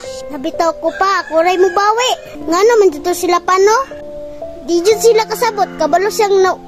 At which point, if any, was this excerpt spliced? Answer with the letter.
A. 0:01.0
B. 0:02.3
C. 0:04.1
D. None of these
B